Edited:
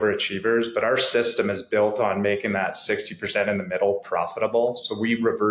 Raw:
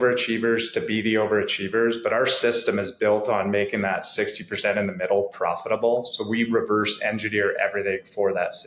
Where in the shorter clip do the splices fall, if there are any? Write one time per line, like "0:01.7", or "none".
none